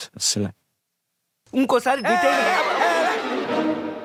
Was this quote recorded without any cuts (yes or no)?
yes